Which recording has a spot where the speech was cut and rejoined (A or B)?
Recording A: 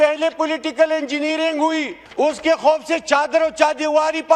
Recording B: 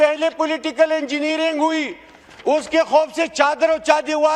A